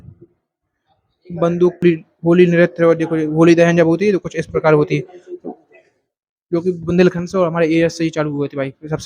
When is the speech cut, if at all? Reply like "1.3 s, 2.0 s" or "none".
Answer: 1.8 s